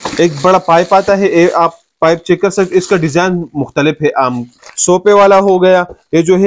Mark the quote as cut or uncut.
cut